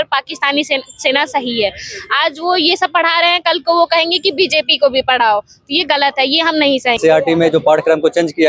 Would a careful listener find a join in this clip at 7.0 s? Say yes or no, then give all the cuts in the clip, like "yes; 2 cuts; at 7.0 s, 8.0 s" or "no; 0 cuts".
yes; 1 cut; at 7.0 s